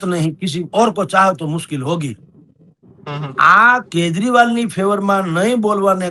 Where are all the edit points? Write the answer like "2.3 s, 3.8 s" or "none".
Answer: none